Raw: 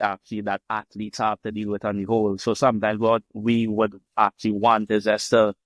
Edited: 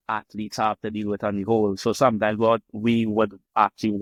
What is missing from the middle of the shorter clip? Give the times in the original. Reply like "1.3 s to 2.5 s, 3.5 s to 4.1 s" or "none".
none